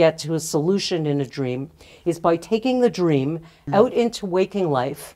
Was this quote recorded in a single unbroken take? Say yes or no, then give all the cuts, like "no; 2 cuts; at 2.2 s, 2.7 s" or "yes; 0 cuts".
no; 1 cut; at 3.6 s